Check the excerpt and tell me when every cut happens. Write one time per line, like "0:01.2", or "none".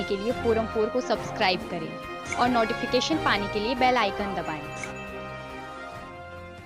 none